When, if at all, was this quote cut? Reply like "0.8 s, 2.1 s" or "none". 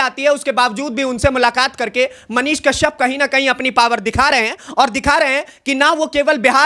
none